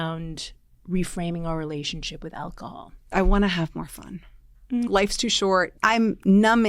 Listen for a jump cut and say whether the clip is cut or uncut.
cut